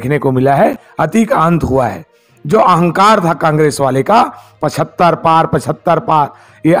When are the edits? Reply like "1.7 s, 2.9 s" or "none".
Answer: 0.9 s